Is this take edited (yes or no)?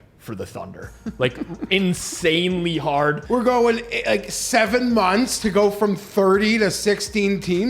yes